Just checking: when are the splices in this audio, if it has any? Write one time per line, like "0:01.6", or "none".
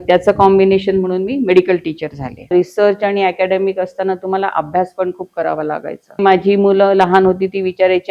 0:02.5
0:06.2